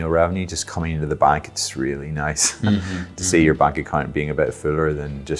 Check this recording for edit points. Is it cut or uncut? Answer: uncut